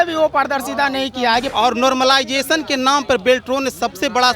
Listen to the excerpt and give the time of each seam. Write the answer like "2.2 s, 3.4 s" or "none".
1.5 s